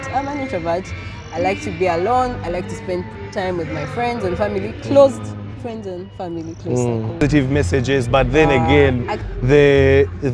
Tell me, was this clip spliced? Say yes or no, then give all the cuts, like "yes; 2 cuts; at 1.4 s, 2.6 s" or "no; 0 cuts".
yes; 1 cut; at 7.2 s